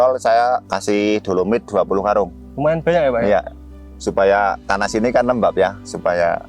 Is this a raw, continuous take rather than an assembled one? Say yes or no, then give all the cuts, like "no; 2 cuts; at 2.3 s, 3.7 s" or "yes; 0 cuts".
yes; 0 cuts